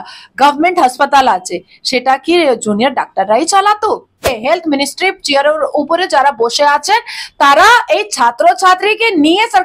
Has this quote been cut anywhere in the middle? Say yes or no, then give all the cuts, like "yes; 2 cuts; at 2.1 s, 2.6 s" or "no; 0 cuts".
yes; 1 cut; at 4.4 s